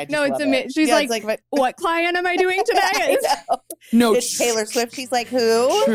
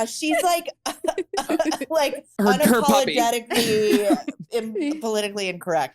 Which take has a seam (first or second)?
second